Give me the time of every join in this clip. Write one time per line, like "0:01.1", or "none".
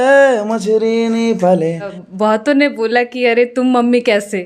0:01.9